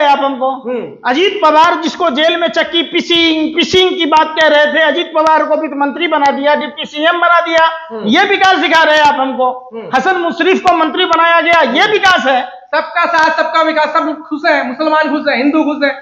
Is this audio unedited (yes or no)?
yes